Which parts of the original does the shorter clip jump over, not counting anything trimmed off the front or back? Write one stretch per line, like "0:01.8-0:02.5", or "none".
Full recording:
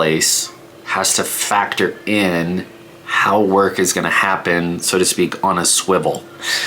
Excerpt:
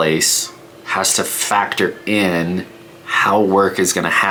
none